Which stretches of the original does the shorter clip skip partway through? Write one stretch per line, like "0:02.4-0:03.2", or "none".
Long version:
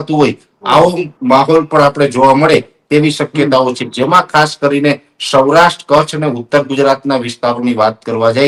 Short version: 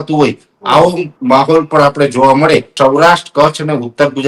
0:02.7-0:05.2